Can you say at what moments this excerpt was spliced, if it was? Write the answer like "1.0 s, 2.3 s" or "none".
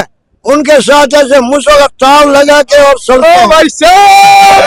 none

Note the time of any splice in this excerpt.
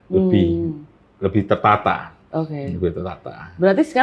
none

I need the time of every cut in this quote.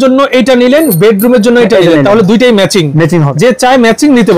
3.3 s

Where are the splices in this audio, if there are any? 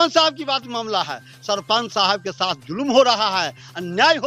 none

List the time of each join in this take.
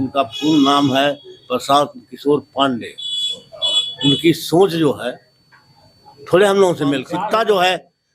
7.1 s

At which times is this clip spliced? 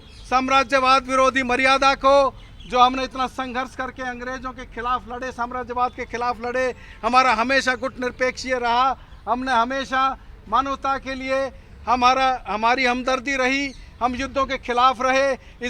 none

